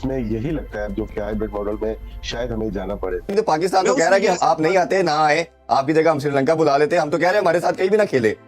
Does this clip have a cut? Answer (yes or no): yes